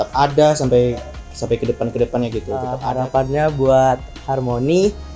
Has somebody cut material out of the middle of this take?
yes; 1 cut; at 2.8 s

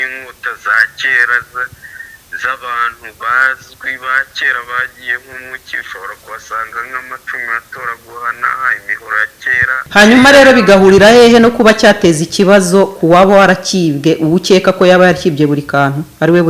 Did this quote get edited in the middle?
yes; 1 cut; at 9.9 s

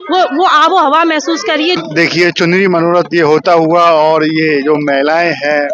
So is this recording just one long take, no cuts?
no; 1 cut; at 1.8 s

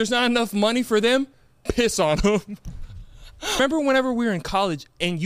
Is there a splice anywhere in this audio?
yes; 1 cut; at 3.6 s

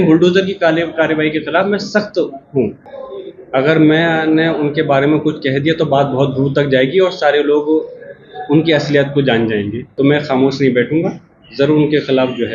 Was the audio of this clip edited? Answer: yes; 2 cuts; at 2.9 s, 9.8 s

